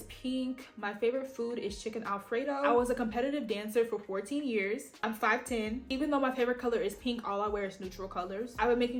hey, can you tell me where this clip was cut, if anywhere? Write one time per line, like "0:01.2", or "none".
none